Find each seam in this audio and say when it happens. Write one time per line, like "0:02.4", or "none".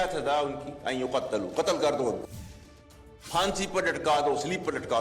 0:02.6